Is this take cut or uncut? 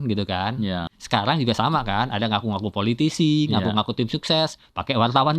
cut